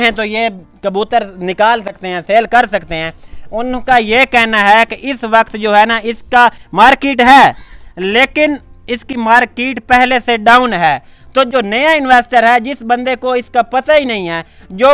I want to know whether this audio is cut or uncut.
uncut